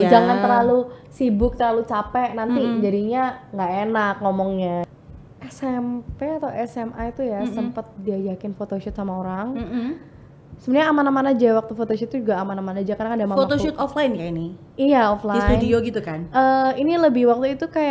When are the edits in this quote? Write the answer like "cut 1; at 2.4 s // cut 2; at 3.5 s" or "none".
cut 1; at 4.8 s